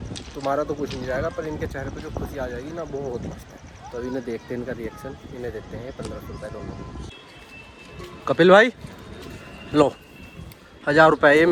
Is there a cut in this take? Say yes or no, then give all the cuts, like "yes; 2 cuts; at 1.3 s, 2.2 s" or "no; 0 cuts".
no; 0 cuts